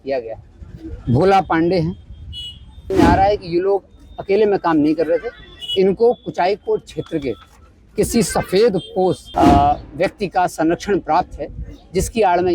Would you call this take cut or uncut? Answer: cut